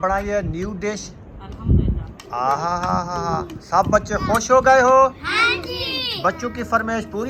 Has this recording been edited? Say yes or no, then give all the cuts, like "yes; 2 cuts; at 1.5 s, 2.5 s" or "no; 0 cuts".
no; 0 cuts